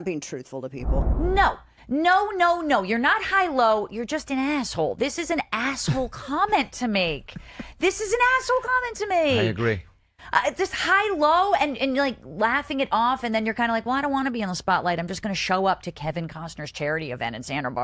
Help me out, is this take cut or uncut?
cut